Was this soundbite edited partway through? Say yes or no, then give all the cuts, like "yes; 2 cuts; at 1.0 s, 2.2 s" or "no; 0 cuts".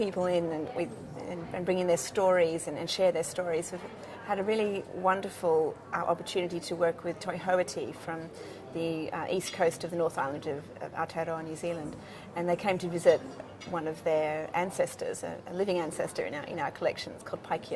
yes; 1 cut; at 14.7 s